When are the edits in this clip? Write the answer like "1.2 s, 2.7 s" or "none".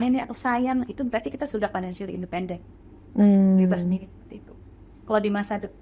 none